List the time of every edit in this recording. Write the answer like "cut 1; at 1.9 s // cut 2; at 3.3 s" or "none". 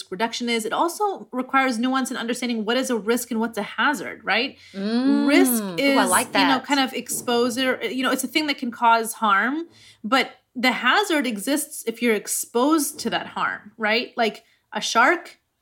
none